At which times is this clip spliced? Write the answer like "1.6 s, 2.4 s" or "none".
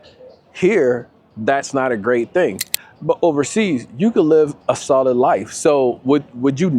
none